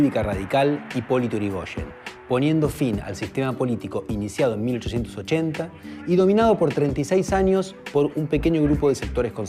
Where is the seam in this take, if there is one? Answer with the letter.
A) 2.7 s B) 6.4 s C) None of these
C